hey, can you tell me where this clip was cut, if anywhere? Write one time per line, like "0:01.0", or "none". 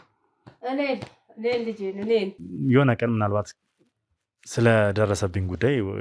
0:02.4